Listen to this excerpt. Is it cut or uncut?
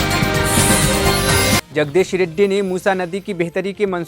cut